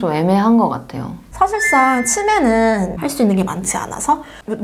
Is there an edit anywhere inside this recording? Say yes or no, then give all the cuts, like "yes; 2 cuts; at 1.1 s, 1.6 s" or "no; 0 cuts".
yes; 2 cuts; at 1.2 s, 3.0 s